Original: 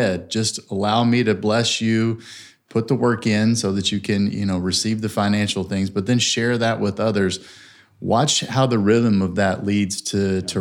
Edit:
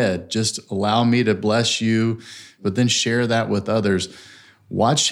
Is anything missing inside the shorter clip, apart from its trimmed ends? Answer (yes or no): yes